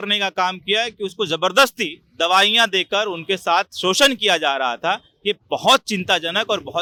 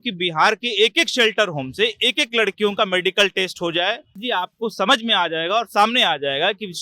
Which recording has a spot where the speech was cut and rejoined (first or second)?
second